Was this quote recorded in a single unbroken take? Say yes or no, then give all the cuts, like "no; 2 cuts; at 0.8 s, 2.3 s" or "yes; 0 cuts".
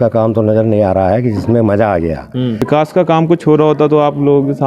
no; 1 cut; at 2.6 s